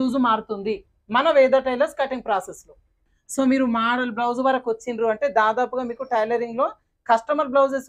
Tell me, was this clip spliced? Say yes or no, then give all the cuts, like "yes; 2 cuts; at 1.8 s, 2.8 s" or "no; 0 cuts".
yes; 1 cut; at 3.1 s